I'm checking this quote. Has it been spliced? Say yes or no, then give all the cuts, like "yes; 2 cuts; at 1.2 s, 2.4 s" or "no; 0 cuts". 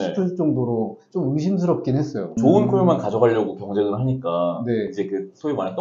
yes; 1 cut; at 2.4 s